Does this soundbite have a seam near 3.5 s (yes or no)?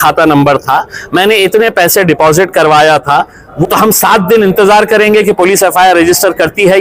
yes